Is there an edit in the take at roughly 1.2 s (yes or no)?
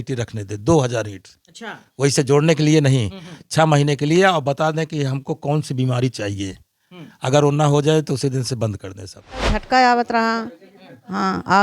no